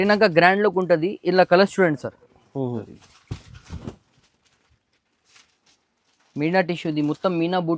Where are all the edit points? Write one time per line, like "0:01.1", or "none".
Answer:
0:02.8

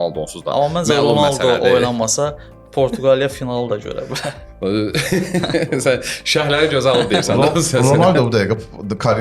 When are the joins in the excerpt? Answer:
none

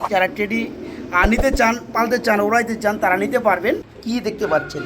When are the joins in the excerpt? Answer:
0:03.9

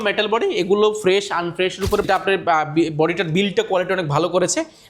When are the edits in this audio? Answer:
0:02.1

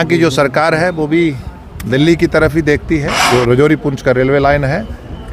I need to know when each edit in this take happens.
0:03.3

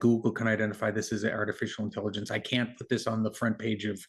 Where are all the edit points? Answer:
none

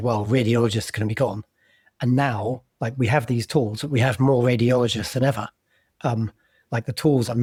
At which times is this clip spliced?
none

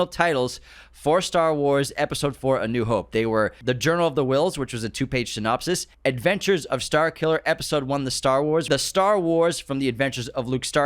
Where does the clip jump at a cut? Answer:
0:03.6
0:05.9
0:08.7

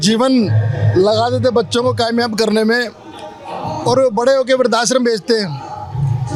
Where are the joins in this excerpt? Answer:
none

